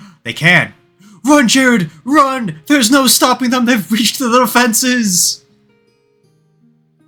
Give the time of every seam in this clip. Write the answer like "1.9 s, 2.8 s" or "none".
none